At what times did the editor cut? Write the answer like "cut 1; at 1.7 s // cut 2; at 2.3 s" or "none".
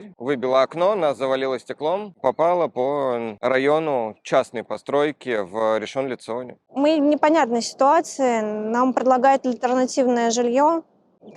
cut 1; at 2.1 s // cut 2; at 6.6 s